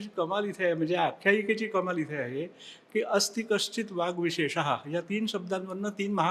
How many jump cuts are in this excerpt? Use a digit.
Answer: 0